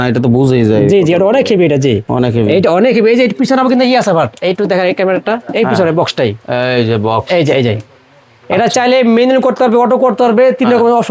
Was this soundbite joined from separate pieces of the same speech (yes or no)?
no